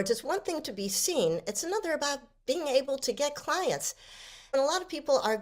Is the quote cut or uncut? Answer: cut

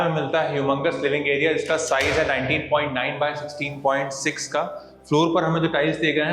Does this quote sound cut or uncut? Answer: uncut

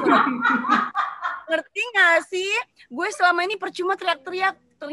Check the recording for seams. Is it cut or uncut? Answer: uncut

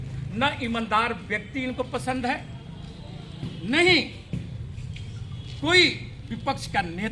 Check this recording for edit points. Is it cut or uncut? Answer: uncut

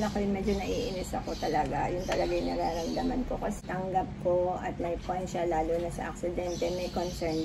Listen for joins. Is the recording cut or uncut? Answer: cut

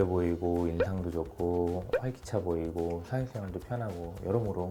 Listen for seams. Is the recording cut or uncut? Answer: uncut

